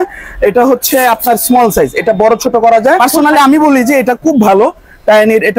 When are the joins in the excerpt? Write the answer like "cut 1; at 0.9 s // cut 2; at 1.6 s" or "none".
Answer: cut 1; at 3.0 s